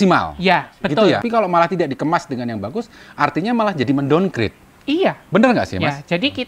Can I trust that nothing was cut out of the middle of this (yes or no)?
no